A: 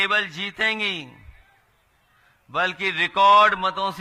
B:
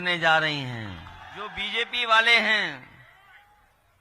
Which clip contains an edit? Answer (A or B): B